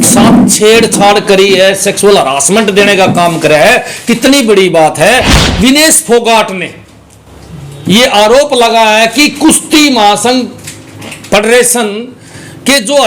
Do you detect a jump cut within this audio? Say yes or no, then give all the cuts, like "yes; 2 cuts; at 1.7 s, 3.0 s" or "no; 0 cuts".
yes; 1 cut; at 5.4 s